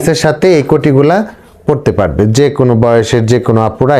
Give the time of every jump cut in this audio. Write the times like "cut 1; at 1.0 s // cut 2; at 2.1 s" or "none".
none